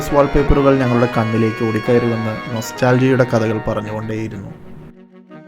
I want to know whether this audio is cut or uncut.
cut